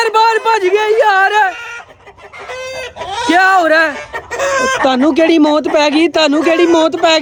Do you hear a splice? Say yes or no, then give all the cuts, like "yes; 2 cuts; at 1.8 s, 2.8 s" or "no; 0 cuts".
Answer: no; 0 cuts